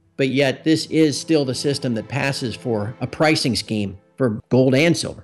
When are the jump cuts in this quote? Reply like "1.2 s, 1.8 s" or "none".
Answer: 4.3 s